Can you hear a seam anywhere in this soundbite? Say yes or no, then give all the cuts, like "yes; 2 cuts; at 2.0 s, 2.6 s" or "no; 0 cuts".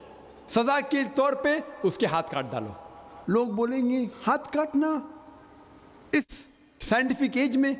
no; 0 cuts